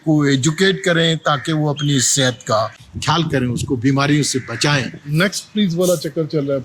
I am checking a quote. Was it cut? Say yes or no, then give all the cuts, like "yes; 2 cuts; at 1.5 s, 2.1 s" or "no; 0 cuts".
yes; 1 cut; at 5.1 s